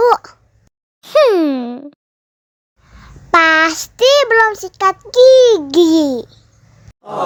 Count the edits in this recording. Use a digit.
0